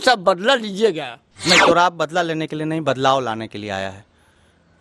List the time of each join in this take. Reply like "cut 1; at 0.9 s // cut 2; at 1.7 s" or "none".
none